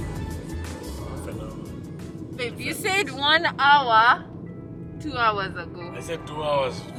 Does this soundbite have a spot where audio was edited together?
no; 0 cuts

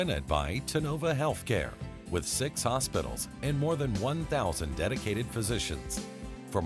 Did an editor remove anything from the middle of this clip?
no; 0 cuts

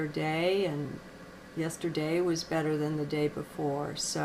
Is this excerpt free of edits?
yes; 0 cuts

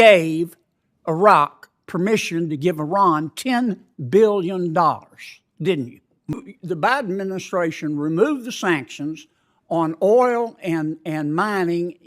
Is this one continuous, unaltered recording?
no; 1 cut; at 6.4 s

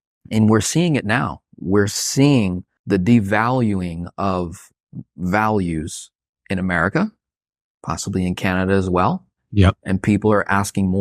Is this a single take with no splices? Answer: no; 1 cut; at 2.7 s

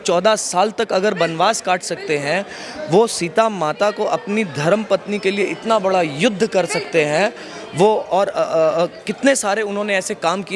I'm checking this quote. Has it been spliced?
no; 0 cuts

